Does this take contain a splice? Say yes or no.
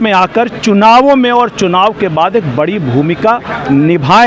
no